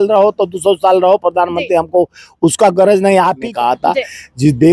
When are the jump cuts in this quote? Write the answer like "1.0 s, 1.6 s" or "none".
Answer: 3.4 s